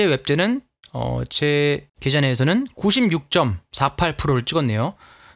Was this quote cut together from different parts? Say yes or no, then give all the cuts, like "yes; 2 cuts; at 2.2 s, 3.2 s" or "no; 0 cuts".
yes; 1 cut; at 1.9 s